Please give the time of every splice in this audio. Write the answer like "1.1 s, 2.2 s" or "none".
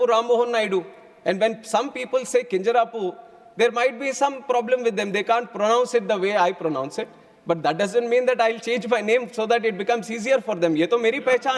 none